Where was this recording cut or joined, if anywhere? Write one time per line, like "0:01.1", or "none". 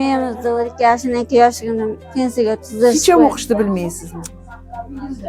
none